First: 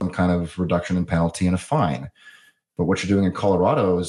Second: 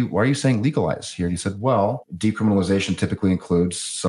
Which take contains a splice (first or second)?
second